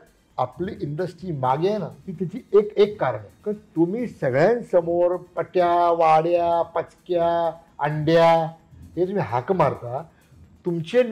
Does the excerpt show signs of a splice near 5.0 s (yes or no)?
no